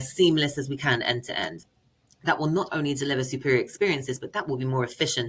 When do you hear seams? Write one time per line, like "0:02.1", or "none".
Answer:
none